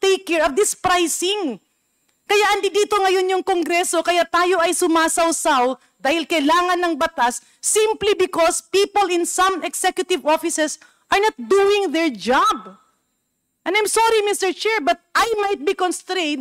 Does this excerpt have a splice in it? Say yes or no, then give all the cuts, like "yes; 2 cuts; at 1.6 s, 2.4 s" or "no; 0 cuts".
no; 0 cuts